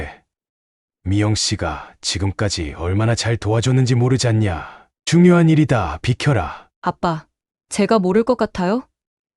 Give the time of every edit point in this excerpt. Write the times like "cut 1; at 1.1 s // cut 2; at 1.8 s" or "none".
cut 1; at 6.6 s